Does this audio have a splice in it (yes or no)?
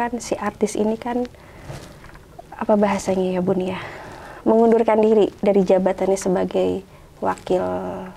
no